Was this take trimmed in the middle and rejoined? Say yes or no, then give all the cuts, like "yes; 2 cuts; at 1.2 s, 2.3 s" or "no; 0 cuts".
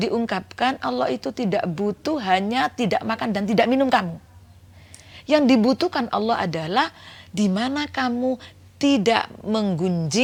no; 0 cuts